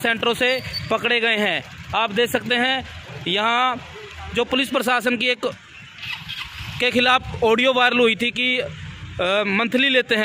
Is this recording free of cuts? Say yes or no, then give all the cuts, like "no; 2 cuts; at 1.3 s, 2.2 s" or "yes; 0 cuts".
yes; 0 cuts